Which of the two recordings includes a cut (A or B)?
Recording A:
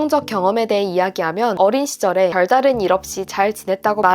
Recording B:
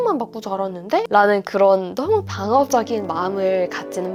A